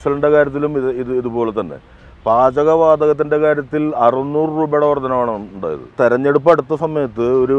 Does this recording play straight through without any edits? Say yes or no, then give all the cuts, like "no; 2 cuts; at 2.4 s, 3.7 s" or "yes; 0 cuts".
no; 1 cut; at 5.9 s